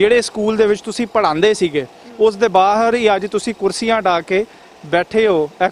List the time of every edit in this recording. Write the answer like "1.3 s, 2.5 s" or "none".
none

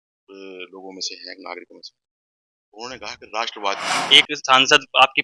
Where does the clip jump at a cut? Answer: 3.9 s

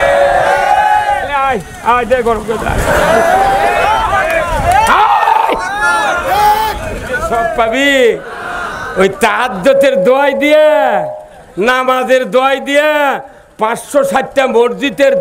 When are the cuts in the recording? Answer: 7.3 s

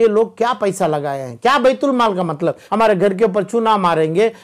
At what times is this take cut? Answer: 2.6 s

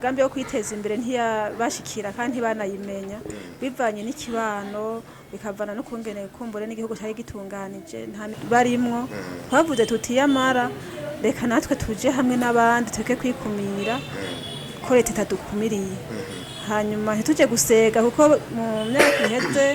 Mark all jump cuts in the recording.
8.4 s

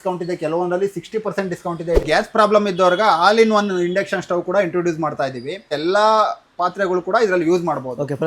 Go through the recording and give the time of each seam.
2.0 s, 5.7 s

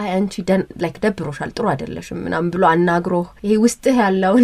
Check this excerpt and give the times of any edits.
3.3 s

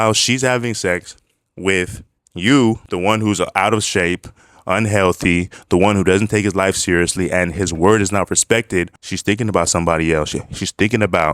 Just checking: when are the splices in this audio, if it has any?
2.9 s, 9.0 s

